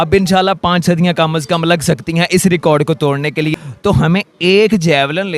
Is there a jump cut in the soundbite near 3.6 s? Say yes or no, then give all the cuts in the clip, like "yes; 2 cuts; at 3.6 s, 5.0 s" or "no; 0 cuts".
yes; 1 cut; at 3.6 s